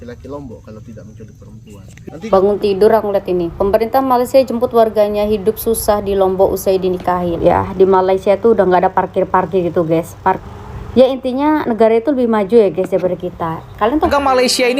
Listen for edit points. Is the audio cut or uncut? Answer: cut